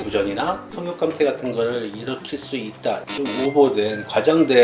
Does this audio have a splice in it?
no; 0 cuts

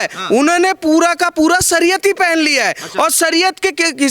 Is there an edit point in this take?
no; 0 cuts

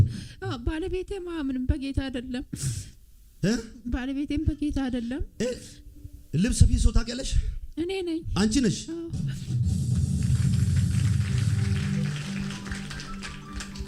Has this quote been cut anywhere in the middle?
no; 0 cuts

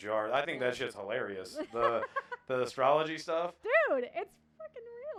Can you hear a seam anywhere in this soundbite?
no; 0 cuts

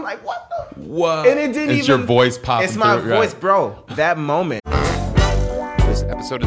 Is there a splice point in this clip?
yes; 2 cuts; at 3.8 s, 4.6 s

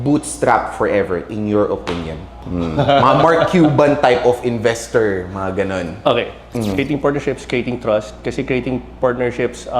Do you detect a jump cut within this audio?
yes; 2 cuts; at 2.4 s, 6.4 s

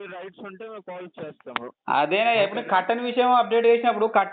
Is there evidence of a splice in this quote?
no; 0 cuts

